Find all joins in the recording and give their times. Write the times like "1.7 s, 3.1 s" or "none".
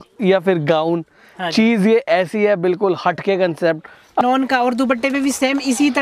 4.2 s